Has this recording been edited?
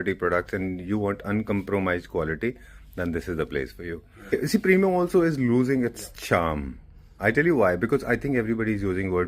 yes; 1 cut; at 4.2 s

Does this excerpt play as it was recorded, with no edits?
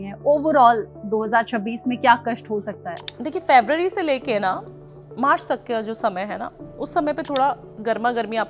yes; 0 cuts

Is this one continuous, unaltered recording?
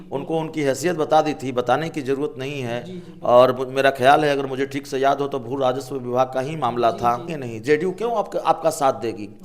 no; 1 cut; at 7.3 s

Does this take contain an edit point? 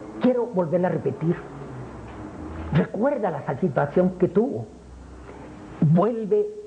no; 0 cuts

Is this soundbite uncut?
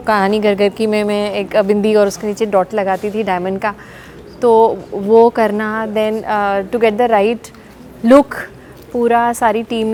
yes; 0 cuts

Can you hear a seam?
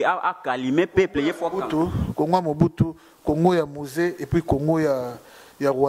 no; 0 cuts

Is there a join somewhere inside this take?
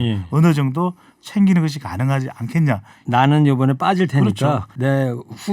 yes; 2 cuts; at 2.9 s, 4.7 s

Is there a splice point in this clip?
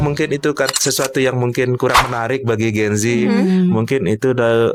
no; 0 cuts

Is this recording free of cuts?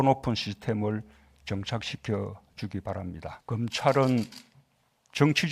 no; 1 cut; at 3.4 s

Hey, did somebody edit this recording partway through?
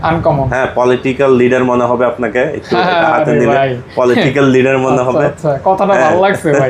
no; 0 cuts

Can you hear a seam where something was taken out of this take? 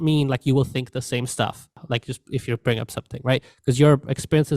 yes; 1 cut; at 1.8 s

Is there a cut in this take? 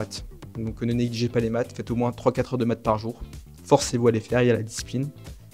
no; 0 cuts

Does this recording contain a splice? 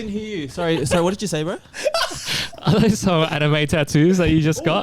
no; 0 cuts

